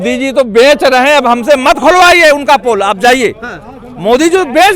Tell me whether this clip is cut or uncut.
uncut